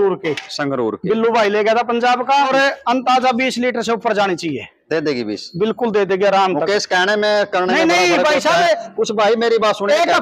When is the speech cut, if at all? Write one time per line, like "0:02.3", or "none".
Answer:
0:02.5